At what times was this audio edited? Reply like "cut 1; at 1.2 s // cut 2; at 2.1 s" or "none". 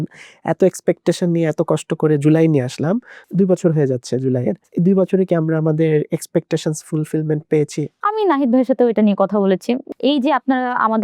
cut 1; at 3.2 s // cut 2; at 4.6 s // cut 3; at 8.0 s // cut 4; at 9.8 s

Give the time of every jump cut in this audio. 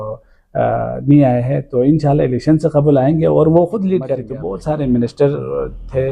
cut 1; at 4.4 s

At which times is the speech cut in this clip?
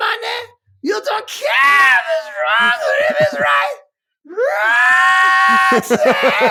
none

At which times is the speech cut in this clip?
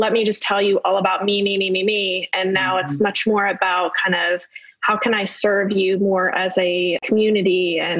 cut 1; at 7.0 s

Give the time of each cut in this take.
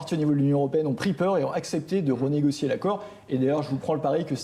none

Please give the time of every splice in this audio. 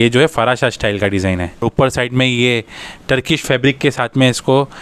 cut 1; at 1.6 s

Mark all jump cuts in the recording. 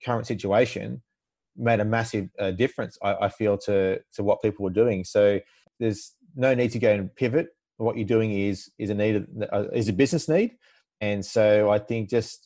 cut 1; at 5.7 s

